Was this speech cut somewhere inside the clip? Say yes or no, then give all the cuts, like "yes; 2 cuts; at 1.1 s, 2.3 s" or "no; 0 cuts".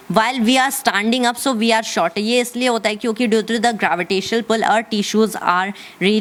no; 0 cuts